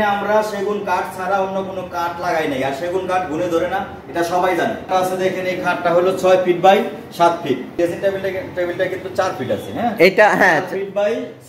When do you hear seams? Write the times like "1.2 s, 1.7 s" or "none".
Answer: 4.9 s, 7.7 s